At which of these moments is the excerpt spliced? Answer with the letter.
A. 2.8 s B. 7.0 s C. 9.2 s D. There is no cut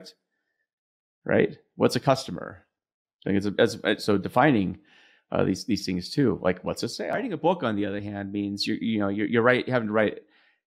B